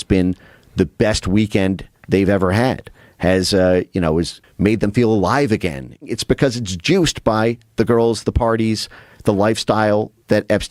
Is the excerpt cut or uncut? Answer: cut